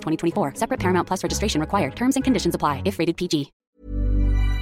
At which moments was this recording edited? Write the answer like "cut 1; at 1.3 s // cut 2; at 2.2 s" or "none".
cut 1; at 3.5 s